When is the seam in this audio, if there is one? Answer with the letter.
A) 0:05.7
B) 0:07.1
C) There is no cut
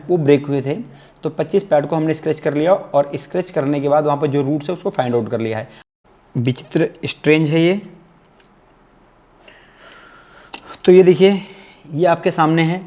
A